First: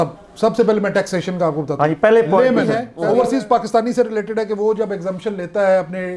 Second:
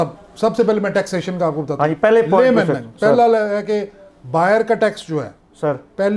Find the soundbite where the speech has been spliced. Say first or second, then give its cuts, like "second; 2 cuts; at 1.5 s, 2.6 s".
first; 1 cut; at 2.9 s